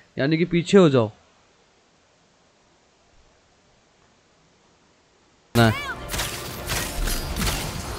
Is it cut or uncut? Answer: cut